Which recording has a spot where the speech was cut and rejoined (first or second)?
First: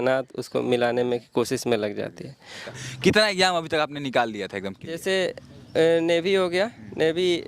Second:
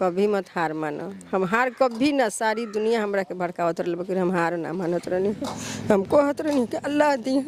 first